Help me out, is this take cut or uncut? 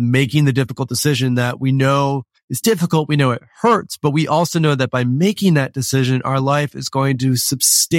uncut